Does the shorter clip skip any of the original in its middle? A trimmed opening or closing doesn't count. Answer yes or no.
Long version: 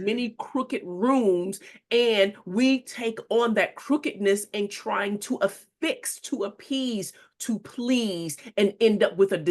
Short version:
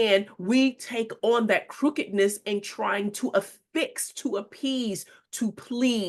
no